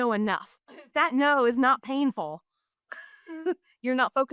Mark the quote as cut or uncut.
uncut